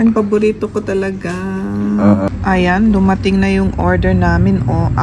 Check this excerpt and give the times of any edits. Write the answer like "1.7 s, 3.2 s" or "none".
2.3 s